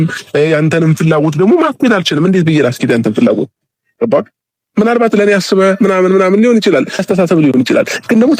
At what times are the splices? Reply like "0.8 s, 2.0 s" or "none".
7.0 s